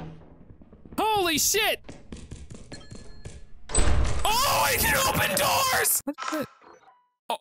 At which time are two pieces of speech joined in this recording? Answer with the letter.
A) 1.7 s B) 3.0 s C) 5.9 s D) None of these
C